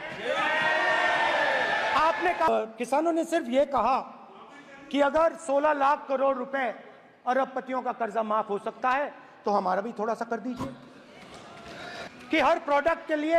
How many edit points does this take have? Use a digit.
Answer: 2